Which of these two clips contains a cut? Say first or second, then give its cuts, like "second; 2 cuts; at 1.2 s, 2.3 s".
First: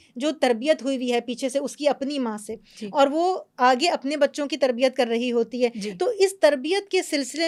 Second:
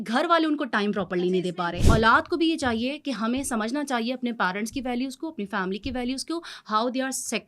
second; 1 cut; at 1.7 s